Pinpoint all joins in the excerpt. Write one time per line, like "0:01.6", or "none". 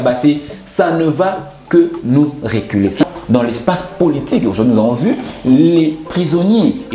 0:03.0